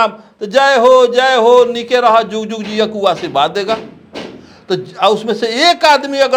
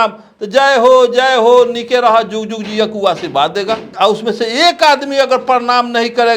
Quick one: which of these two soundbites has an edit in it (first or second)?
second